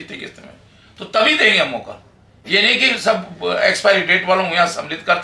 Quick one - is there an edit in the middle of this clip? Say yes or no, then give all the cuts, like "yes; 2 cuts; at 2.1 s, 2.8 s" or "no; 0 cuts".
no; 0 cuts